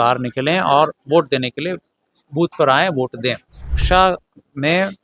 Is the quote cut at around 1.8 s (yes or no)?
no